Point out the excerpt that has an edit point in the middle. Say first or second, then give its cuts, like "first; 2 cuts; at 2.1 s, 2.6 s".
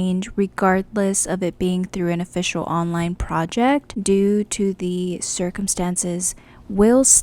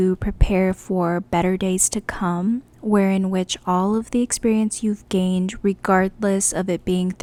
first; 1 cut; at 3.9 s